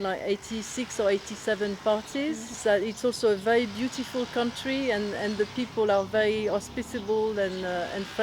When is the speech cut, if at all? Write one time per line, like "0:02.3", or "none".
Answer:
0:02.5